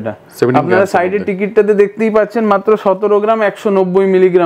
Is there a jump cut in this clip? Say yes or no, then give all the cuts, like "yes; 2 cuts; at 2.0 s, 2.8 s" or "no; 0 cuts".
no; 0 cuts